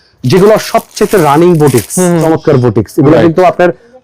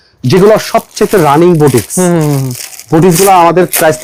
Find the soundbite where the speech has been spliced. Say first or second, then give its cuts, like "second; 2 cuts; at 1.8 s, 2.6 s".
first; 1 cut; at 2.2 s